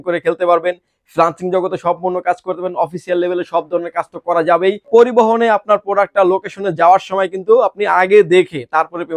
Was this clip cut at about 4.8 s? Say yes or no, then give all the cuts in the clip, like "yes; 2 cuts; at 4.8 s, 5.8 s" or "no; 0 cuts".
yes; 1 cut; at 4.8 s